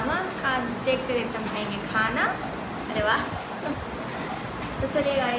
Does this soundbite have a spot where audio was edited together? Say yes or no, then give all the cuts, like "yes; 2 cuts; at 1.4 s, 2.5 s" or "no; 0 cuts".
no; 0 cuts